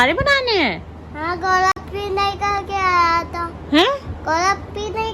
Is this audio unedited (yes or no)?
yes